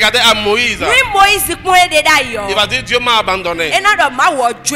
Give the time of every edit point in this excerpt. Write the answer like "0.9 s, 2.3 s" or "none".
none